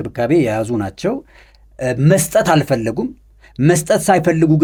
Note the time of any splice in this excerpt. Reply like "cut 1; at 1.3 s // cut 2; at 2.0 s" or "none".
none

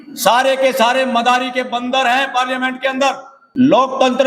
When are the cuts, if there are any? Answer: cut 1; at 3.3 s

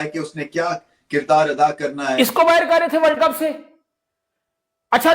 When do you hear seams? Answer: cut 1; at 2.0 s

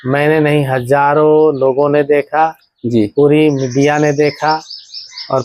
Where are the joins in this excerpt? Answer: none

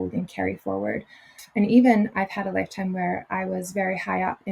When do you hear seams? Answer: cut 1; at 1.4 s

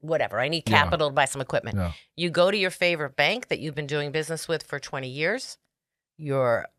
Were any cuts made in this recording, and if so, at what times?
none

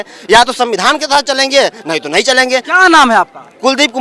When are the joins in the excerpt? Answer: none

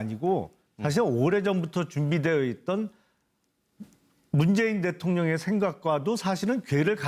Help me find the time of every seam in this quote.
none

